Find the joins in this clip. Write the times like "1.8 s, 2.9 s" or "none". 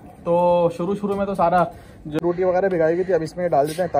2.2 s